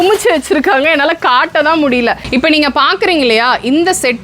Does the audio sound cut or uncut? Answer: cut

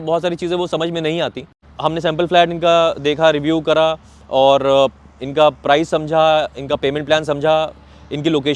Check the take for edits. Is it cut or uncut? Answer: cut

